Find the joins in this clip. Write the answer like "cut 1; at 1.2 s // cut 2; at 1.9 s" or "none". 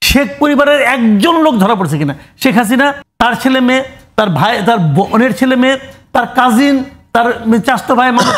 cut 1; at 3.0 s